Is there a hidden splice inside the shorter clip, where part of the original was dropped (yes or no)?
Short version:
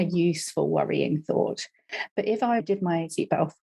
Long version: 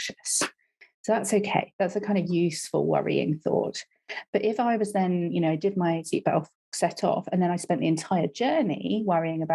yes